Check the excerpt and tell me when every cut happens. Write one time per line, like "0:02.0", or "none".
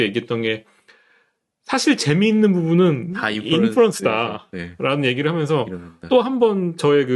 none